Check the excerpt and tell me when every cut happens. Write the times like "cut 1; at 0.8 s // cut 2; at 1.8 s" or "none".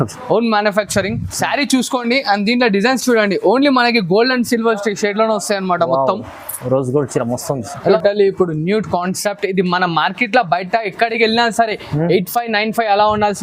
cut 1; at 7.8 s